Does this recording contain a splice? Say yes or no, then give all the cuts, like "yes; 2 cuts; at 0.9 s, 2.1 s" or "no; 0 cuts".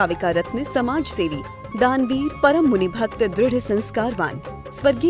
no; 0 cuts